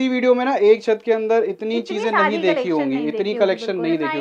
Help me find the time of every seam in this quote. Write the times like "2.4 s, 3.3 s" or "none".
none